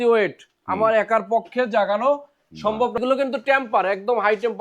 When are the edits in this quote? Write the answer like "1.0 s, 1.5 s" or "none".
3.0 s

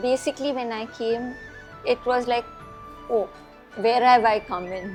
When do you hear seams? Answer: none

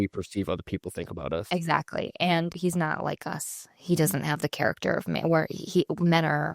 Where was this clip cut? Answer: 2.5 s

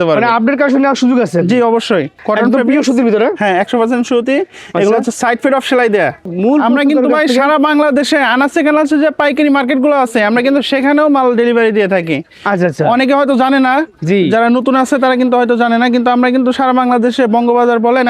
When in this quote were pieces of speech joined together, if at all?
2.2 s, 6.3 s

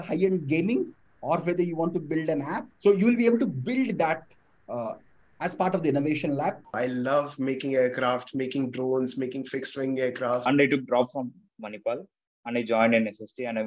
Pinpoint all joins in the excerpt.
2.6 s, 6.8 s, 10.4 s

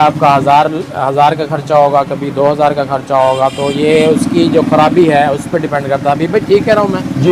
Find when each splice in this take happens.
none

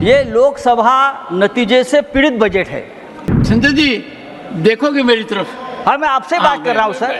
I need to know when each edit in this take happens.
3.3 s

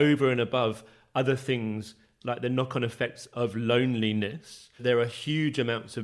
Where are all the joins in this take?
4.9 s

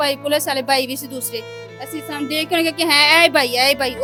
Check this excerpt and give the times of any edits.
none

